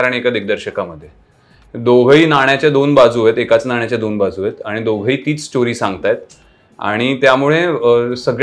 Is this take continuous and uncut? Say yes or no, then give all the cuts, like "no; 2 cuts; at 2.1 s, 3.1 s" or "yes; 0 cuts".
yes; 0 cuts